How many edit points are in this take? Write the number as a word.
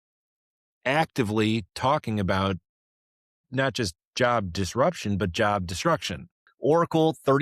one